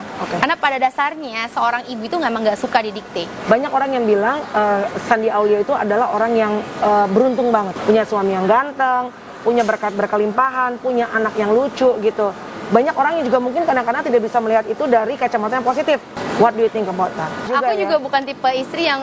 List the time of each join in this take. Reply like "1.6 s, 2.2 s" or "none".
3.4 s, 7.7 s, 16.2 s, 17.5 s